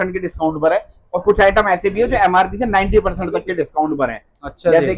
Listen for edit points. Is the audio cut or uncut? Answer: uncut